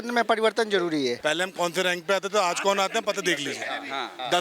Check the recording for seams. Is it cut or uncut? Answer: cut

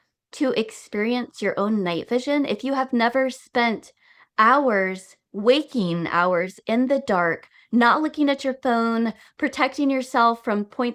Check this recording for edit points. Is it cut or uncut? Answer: uncut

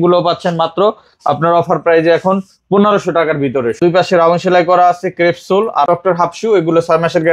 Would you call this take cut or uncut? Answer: cut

